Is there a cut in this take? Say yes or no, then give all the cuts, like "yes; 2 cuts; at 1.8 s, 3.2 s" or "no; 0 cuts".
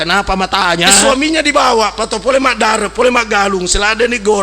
yes; 1 cut; at 1.0 s